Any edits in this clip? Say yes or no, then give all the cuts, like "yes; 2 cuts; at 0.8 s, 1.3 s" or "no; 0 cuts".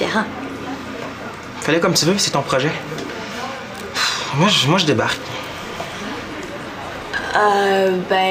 no; 0 cuts